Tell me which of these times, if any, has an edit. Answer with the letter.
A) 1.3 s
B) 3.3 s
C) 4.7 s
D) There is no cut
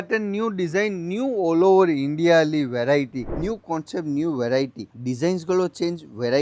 B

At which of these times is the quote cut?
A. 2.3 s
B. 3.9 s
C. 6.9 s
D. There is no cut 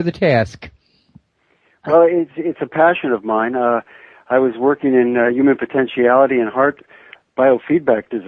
C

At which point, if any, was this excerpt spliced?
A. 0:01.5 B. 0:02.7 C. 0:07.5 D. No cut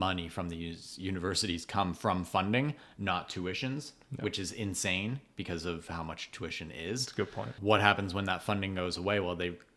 C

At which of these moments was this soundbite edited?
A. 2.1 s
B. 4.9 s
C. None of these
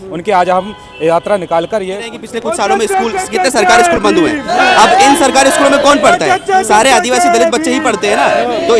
A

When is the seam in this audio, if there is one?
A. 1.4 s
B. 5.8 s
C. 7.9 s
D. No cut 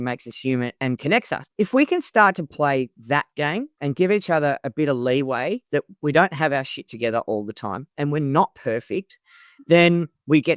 A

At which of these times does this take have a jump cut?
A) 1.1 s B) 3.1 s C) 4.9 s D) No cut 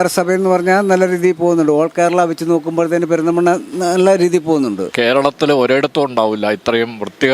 C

